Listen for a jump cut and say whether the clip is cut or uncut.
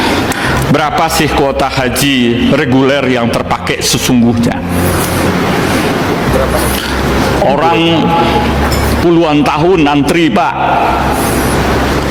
uncut